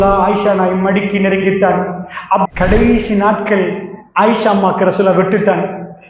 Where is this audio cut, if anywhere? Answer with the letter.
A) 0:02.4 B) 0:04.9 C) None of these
A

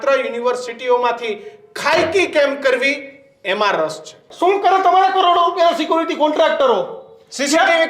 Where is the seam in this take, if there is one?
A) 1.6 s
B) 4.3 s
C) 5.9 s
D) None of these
B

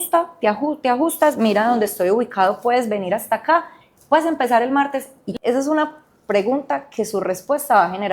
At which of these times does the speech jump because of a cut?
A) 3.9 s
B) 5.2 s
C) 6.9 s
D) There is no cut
B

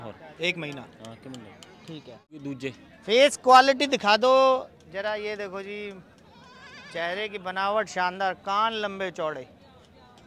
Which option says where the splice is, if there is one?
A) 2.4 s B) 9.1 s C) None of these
A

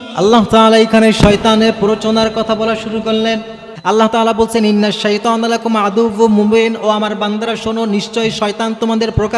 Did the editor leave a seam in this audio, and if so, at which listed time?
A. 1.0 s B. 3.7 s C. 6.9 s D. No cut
B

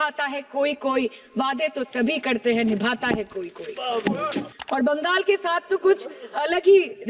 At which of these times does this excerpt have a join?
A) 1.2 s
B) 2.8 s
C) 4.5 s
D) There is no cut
C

